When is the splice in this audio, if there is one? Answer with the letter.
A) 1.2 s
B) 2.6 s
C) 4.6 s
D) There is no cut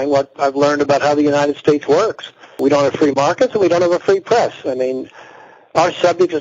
B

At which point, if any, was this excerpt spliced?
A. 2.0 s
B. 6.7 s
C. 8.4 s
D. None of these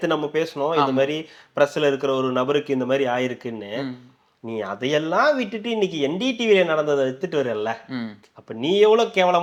D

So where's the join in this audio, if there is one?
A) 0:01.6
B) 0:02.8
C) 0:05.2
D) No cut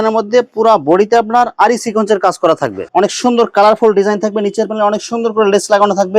B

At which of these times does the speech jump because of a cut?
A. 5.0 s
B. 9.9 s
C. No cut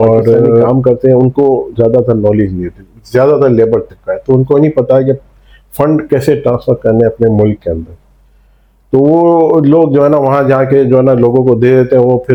C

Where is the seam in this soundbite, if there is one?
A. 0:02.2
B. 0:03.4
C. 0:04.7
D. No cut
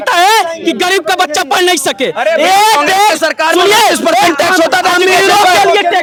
D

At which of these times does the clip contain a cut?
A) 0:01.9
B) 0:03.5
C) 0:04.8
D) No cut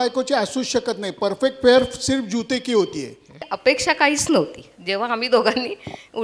B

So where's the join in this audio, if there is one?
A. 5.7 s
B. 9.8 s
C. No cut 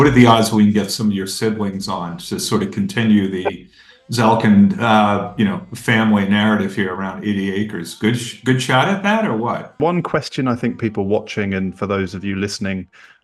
B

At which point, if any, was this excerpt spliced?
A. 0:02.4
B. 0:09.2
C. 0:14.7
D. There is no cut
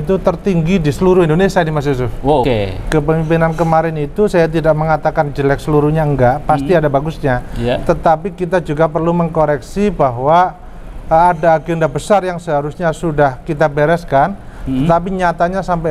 A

